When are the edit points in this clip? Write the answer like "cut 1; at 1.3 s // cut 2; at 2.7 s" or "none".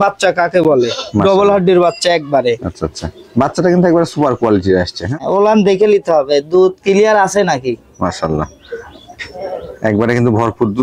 cut 1; at 5.2 s